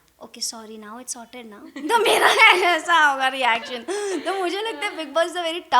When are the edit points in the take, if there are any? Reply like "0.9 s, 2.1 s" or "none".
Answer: none